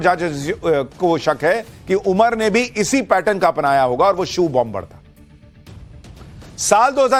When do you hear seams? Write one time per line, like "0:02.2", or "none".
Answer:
none